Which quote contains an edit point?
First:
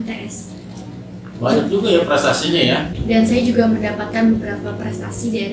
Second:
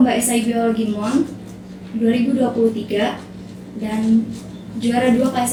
first; 1 cut; at 2.9 s

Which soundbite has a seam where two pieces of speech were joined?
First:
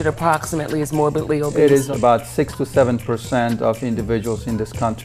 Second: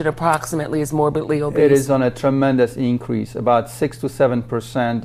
first; 1 cut; at 1.9 s

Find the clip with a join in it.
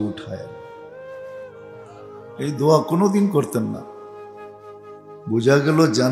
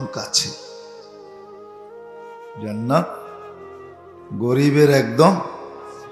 first; 2 cuts; at 3.8 s, 5.2 s

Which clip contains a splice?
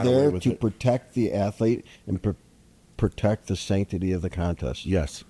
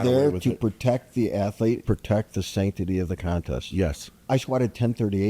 second; 2 cuts; at 1.8 s, 4.1 s

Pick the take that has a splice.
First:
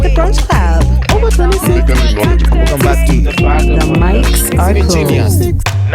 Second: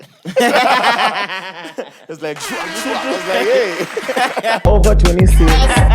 second; 1 cut; at 4.6 s

